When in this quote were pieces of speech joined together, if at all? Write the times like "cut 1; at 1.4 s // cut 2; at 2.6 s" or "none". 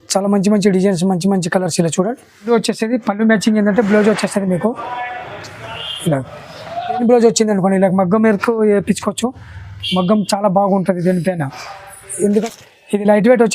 cut 1; at 2.4 s // cut 2; at 7.0 s // cut 3; at 12.4 s